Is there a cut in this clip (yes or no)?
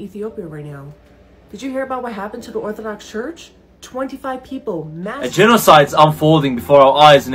yes